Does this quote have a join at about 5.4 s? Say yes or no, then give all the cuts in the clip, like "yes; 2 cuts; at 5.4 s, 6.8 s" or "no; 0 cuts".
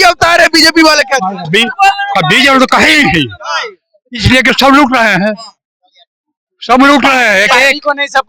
no; 0 cuts